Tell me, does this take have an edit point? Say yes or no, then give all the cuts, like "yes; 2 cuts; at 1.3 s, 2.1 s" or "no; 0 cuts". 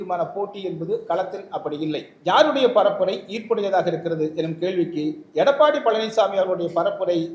yes; 1 cut; at 2.1 s